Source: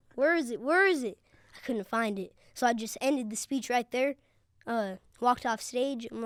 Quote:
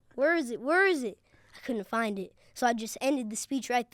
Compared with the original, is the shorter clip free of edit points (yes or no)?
yes